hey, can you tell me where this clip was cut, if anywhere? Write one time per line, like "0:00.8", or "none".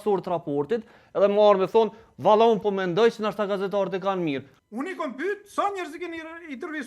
0:04.5

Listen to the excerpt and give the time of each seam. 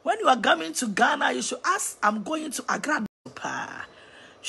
0:03.1

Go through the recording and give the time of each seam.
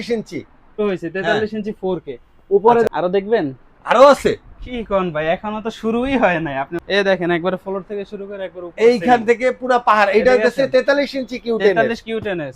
0:00.8
0:02.9
0:06.8

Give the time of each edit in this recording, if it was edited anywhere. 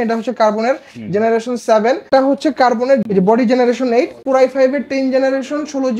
0:02.1
0:03.0
0:04.2

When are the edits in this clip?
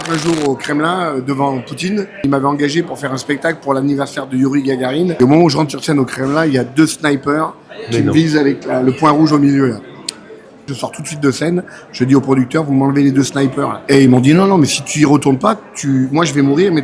0:02.2
0:05.1
0:10.7
0:13.8

